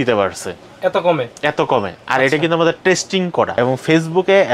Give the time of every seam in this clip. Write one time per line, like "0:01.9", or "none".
0:03.6